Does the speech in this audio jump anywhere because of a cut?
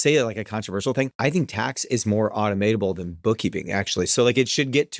yes; 1 cut; at 1.1 s

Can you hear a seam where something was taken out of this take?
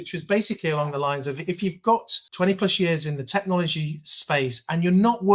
yes; 1 cut; at 2.2 s

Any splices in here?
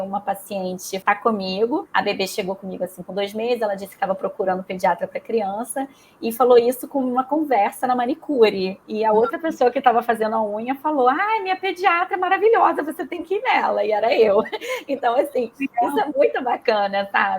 yes; 2 cuts; at 0.9 s, 1.9 s

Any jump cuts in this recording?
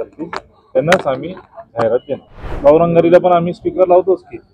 yes; 1 cut; at 2.6 s

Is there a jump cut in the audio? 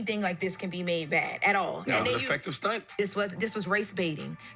yes; 1 cut; at 2.9 s

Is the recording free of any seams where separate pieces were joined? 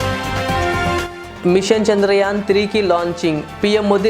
yes; 0 cuts

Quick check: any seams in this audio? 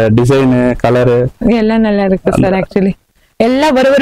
no; 0 cuts

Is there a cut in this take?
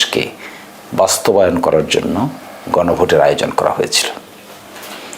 no; 0 cuts

